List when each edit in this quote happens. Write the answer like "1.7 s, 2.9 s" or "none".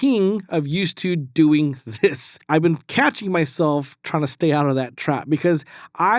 2.4 s